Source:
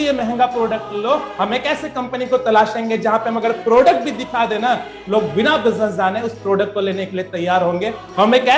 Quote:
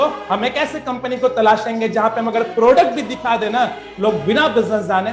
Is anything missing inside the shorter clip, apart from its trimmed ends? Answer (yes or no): no